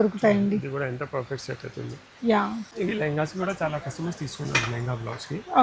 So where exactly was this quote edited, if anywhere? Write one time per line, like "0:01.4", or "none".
0:02.7